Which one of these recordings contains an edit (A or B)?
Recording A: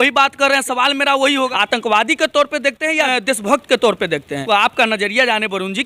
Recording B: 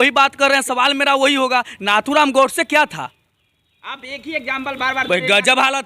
A